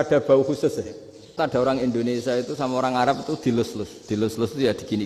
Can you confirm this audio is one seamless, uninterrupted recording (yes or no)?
no